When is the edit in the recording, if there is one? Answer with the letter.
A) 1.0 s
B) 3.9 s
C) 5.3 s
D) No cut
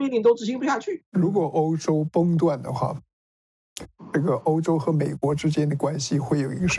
A